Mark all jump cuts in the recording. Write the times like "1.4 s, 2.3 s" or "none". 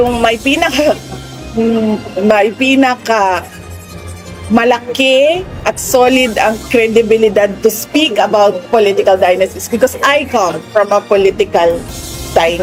none